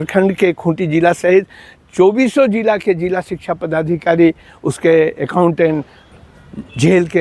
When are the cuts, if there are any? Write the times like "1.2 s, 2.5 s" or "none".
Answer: 6.0 s